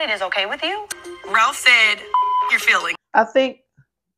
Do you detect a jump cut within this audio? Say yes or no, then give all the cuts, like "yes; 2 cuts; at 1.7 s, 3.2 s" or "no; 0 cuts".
yes; 1 cut; at 2.9 s